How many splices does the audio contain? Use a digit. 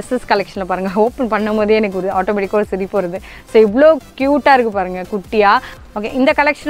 1